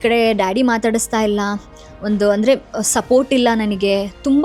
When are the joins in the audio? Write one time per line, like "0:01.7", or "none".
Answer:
none